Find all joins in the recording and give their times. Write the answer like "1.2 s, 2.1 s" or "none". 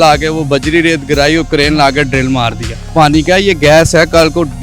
2.8 s